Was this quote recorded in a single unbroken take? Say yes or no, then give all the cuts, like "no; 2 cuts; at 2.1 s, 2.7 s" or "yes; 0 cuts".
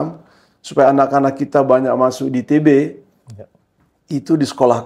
yes; 0 cuts